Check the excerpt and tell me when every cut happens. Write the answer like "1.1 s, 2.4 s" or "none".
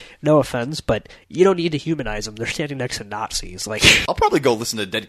4.0 s

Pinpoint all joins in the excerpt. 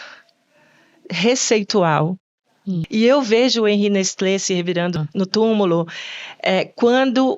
2.8 s, 5.0 s

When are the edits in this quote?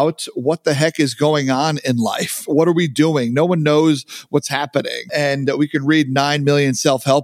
5.0 s

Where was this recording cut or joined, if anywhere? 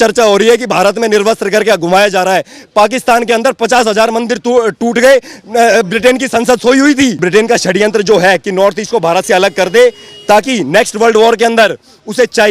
7.2 s

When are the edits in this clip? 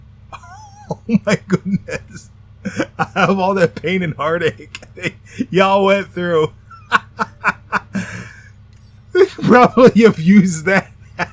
none

